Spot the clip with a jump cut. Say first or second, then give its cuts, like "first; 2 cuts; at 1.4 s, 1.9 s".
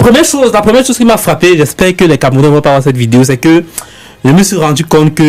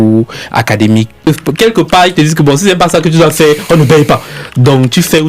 second; 1 cut; at 1.3 s